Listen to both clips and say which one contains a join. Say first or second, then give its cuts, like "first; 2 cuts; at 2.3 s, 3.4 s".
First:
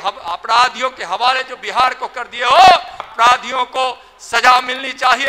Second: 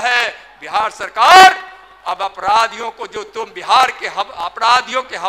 first; 1 cut; at 3.1 s